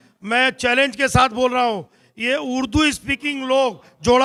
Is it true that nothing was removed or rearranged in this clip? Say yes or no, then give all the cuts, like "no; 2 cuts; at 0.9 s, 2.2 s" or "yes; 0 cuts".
yes; 0 cuts